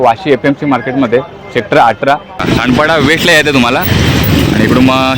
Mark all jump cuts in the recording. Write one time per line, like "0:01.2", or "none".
0:02.4